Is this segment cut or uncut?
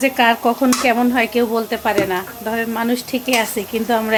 uncut